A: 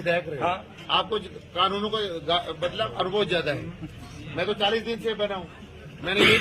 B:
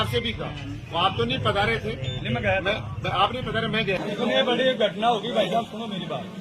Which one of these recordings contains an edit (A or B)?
B